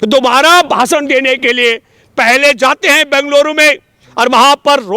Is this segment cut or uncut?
uncut